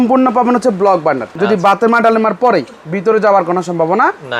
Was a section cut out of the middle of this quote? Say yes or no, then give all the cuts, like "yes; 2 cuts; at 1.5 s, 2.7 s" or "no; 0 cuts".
yes; 1 cut; at 1.3 s